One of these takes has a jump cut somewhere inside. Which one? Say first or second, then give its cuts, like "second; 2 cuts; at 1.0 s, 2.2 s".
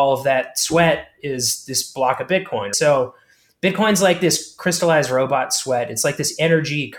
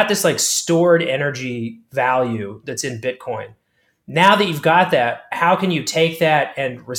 first; 1 cut; at 2.7 s